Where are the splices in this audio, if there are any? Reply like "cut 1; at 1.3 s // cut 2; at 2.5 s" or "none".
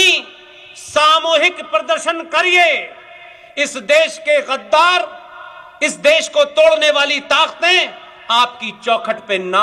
none